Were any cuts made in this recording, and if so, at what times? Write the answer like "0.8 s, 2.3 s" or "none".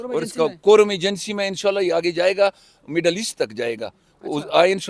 none